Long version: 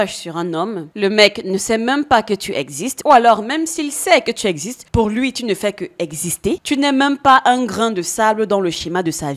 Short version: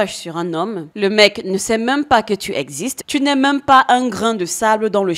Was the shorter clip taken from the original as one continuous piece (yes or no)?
no